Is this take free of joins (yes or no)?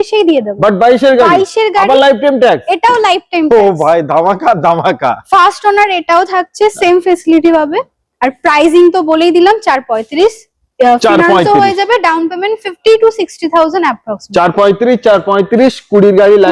yes